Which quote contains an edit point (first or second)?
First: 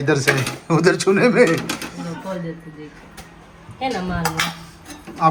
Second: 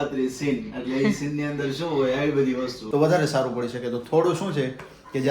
second